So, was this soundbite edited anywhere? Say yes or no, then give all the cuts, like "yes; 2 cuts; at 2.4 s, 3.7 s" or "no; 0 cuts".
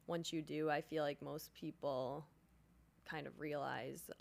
no; 0 cuts